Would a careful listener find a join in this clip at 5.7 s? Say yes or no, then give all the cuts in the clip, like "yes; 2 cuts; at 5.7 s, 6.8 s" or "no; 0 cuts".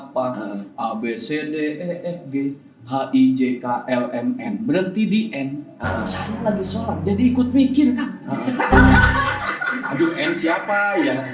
no; 0 cuts